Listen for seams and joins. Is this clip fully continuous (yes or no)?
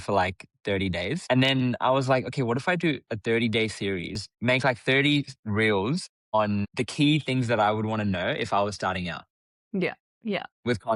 no